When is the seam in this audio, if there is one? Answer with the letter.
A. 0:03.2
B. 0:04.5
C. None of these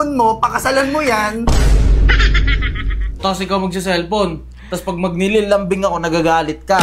A